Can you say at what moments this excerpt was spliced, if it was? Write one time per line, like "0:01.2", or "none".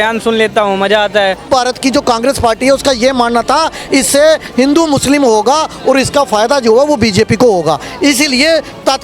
0:01.4